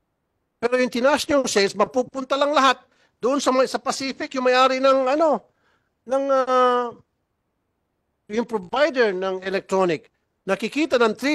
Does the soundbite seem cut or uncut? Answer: uncut